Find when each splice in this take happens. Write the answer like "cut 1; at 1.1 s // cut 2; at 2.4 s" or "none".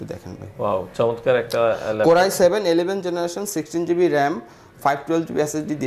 none